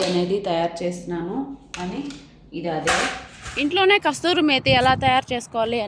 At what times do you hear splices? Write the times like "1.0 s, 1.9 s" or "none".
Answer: 3.4 s